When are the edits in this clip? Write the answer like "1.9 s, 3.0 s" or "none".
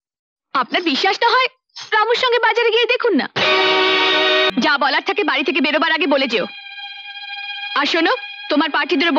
4.5 s